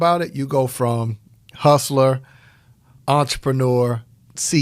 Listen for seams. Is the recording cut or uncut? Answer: uncut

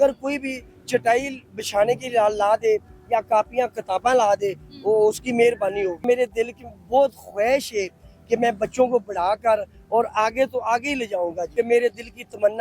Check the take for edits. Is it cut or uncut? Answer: cut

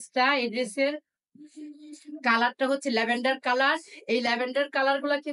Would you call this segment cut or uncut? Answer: uncut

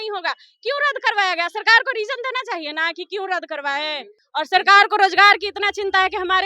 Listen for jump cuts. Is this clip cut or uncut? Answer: cut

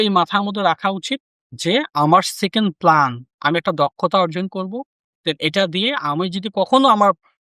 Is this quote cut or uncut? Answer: uncut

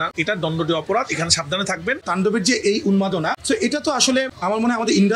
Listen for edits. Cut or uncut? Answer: cut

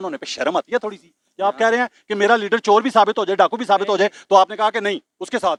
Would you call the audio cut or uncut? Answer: uncut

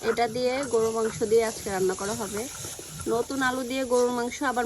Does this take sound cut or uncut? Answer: cut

